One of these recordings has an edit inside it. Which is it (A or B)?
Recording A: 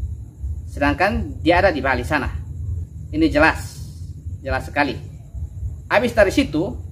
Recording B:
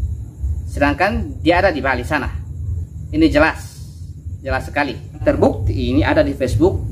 B